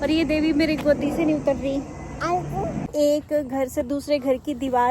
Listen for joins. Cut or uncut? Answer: cut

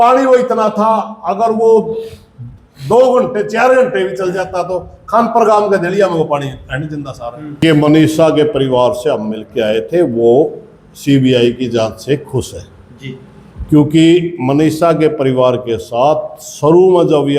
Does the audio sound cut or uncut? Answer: cut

